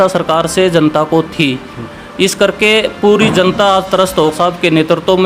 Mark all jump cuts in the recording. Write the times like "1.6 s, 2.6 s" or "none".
4.3 s